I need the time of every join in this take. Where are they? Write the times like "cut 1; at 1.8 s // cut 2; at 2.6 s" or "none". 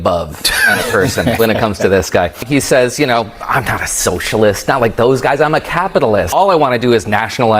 cut 1; at 2.4 s // cut 2; at 6.3 s